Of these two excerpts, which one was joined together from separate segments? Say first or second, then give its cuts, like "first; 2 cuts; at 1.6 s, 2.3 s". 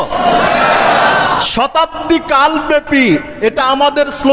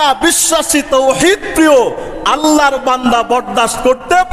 first; 2 cuts; at 1.5 s, 3.3 s